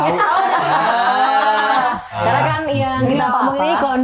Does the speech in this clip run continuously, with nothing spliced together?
no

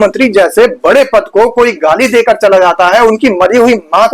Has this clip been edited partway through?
no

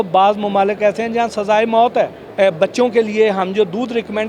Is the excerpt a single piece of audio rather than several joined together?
no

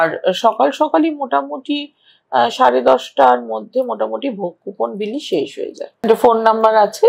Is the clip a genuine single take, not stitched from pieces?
no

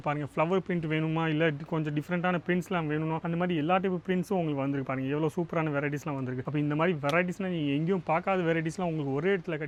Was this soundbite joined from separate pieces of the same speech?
no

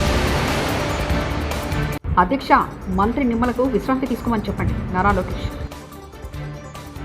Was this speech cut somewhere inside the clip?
yes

